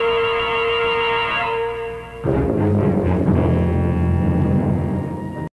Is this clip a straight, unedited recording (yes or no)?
yes